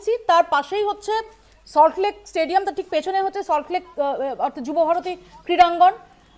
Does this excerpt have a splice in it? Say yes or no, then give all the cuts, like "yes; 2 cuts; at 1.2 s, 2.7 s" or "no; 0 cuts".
no; 0 cuts